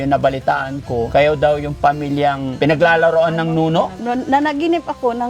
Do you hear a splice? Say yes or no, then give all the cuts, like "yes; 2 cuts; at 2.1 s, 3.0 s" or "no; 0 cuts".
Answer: yes; 3 cuts; at 1.1 s, 2.5 s, 4.0 s